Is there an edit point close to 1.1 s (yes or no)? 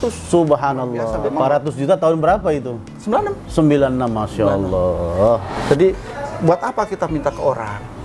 yes